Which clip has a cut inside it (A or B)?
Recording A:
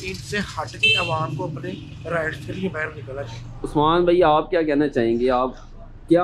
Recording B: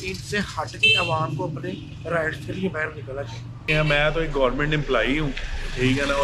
B